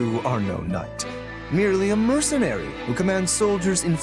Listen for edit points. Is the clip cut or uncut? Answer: uncut